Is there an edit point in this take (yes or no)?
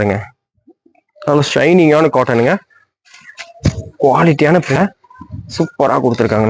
yes